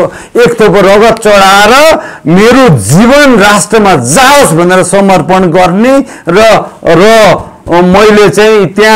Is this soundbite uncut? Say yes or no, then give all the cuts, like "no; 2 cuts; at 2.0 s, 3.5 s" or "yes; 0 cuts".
yes; 0 cuts